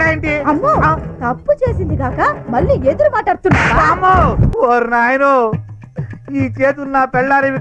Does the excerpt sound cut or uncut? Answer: cut